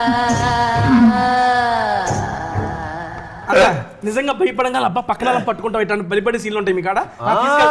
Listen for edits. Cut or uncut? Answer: cut